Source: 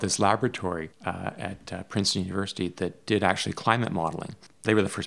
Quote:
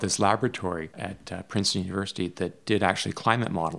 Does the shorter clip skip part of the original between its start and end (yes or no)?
yes